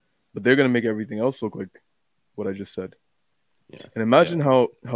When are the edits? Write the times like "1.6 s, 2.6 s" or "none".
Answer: none